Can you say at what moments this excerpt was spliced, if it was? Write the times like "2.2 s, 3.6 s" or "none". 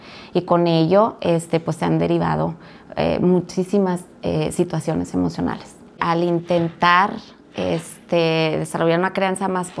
6.0 s